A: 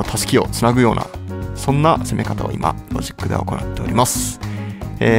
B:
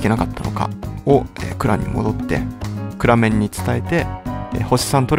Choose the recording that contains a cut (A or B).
B